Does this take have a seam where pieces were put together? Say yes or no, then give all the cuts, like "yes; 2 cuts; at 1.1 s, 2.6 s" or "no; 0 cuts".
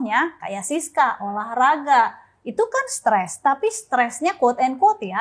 no; 0 cuts